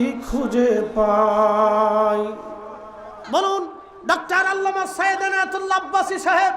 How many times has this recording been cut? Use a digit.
1